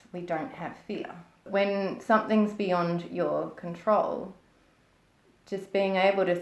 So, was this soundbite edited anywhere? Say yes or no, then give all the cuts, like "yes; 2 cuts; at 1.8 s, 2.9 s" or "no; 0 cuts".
yes; 1 cut; at 1.4 s